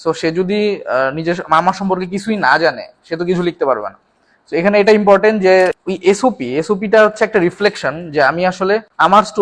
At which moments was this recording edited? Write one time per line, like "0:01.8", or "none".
0:05.7